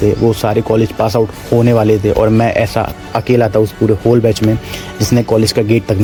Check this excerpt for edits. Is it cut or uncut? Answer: uncut